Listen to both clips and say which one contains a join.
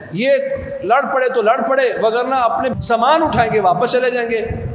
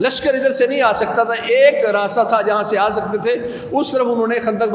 first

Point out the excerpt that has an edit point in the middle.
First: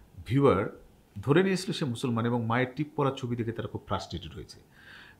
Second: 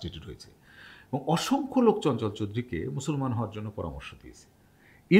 first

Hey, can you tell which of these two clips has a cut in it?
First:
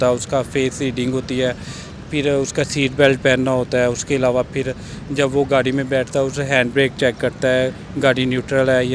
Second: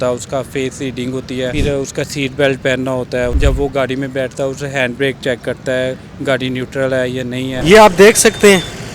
second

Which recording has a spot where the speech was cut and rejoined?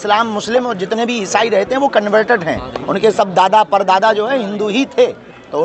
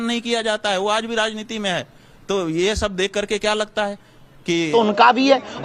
second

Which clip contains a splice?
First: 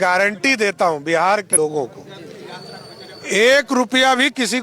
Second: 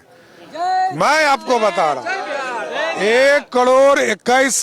first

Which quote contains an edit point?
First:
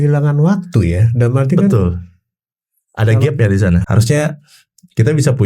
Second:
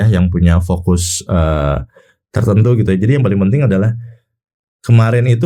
first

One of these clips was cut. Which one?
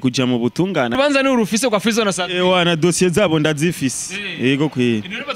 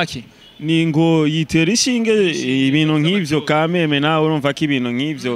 first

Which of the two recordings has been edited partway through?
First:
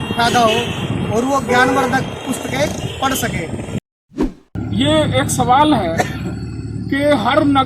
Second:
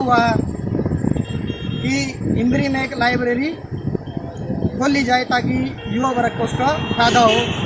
first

